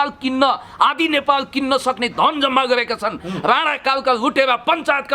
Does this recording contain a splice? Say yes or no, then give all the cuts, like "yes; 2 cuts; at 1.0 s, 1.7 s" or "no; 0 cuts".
no; 0 cuts